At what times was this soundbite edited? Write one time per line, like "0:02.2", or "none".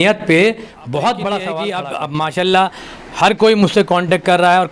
0:01.7